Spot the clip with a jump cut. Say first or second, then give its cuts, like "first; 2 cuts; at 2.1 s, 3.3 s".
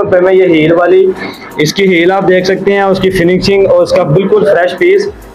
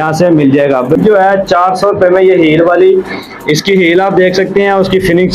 second; 1 cut; at 1.0 s